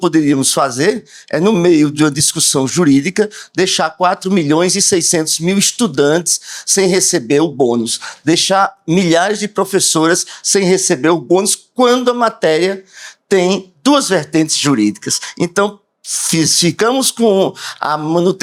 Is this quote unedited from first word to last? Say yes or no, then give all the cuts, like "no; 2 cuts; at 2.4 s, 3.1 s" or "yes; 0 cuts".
yes; 0 cuts